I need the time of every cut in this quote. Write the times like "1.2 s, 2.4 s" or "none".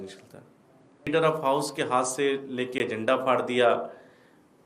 1.1 s